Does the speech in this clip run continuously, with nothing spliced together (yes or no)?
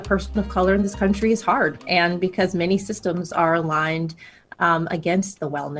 yes